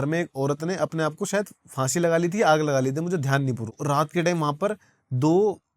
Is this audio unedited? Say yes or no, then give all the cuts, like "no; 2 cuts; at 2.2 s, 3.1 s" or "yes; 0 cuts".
no; 1 cut; at 3.8 s